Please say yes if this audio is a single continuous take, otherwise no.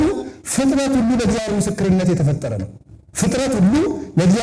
yes